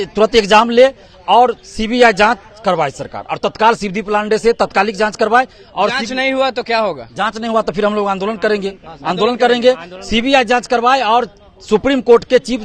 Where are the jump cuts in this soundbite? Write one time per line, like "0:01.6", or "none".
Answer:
none